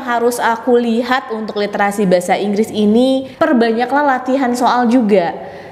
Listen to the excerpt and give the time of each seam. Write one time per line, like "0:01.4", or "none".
0:03.3